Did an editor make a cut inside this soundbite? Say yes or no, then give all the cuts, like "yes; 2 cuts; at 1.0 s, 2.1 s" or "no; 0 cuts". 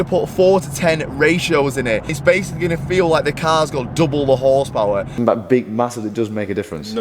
yes; 2 cuts; at 2.2 s, 5.2 s